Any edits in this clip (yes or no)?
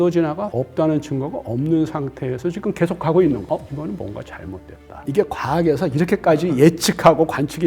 yes